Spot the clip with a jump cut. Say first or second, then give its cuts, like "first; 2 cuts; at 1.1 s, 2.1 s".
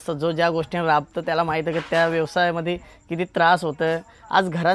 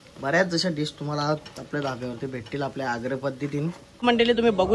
second; 1 cut; at 3.9 s